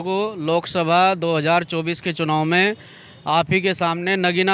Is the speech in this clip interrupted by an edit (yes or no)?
no